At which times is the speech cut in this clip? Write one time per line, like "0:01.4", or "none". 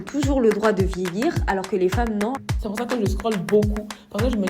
0:02.4